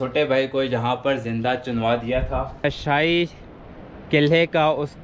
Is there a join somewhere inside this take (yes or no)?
yes